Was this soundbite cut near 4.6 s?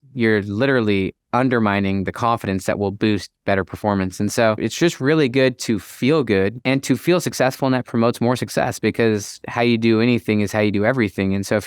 yes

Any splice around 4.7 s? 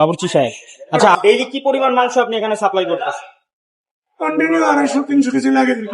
no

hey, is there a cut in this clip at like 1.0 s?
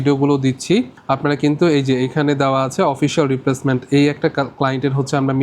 yes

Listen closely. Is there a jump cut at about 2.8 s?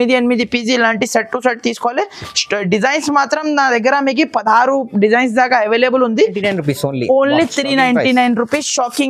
no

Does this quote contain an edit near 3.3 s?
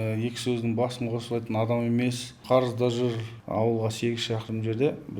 yes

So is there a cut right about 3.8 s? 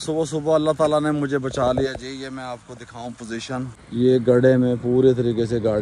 yes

